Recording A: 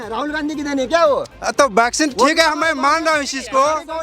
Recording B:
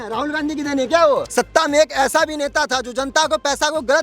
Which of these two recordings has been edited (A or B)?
B